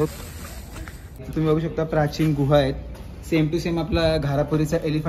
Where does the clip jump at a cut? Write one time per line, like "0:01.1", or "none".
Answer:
0:01.3